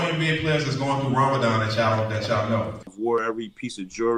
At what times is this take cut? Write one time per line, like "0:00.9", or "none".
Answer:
0:02.9